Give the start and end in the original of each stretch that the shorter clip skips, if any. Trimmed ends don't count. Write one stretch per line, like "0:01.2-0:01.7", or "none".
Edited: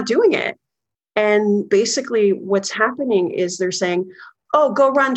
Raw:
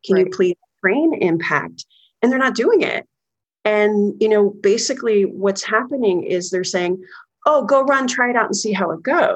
0:04.1-0:04.6